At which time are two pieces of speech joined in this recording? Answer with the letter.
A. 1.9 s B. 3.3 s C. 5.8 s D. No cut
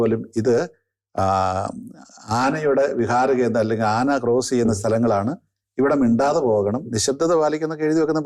D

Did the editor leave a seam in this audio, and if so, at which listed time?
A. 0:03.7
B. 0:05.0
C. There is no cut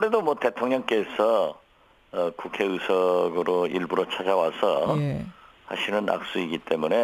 A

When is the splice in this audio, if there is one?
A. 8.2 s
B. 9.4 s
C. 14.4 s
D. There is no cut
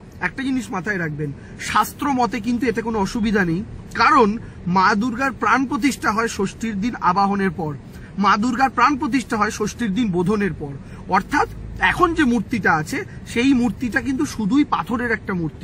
D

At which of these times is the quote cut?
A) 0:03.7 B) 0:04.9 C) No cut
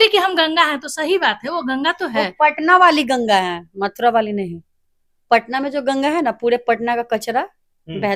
C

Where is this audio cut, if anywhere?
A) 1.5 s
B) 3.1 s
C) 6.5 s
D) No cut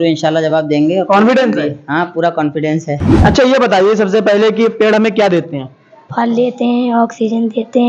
B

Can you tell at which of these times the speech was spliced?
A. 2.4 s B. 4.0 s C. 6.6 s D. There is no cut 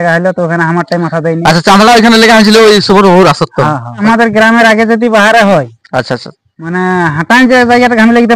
B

